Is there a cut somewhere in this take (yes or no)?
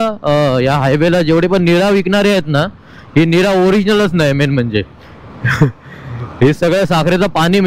no